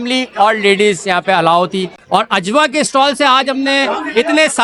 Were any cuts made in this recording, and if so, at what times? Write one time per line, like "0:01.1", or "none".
0:02.0